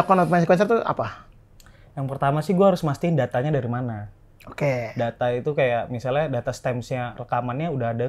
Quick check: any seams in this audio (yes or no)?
no